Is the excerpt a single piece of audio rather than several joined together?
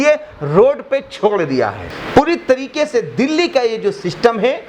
no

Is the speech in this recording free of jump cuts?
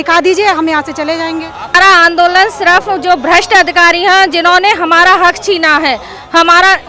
no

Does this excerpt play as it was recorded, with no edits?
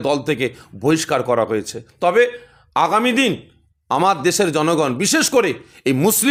yes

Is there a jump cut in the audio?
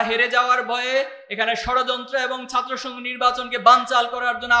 no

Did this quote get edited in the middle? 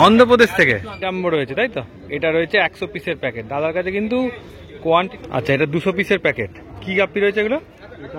yes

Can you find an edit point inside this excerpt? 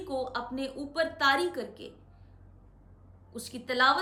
no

